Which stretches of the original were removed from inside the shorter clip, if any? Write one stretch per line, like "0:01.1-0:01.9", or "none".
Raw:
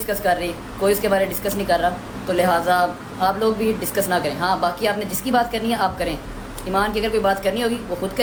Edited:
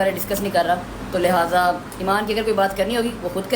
0:03.0-0:06.6